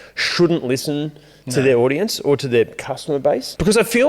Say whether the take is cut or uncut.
uncut